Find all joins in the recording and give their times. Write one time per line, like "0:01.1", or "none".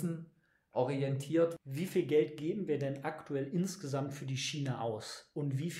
0:01.5